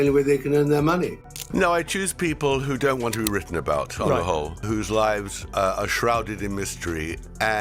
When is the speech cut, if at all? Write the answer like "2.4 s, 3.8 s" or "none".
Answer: 1.5 s

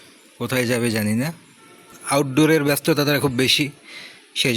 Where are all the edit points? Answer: 2.0 s

